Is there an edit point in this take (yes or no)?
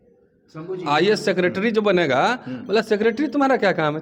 no